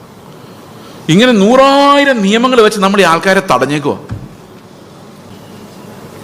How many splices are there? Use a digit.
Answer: 1